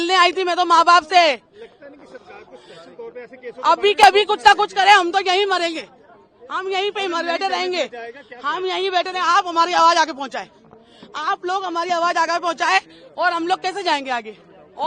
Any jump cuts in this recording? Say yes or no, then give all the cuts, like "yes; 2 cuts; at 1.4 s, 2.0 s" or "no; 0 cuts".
no; 0 cuts